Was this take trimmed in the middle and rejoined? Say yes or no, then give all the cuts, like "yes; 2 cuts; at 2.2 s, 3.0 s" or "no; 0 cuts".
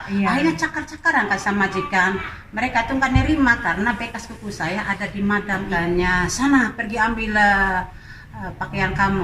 yes; 1 cut; at 5.7 s